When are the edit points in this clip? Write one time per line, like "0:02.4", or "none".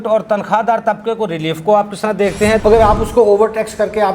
0:02.6